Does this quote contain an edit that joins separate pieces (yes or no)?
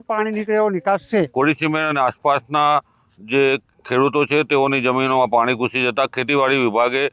yes